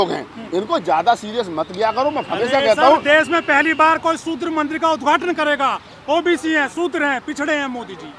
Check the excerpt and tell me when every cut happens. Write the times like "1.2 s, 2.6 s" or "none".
none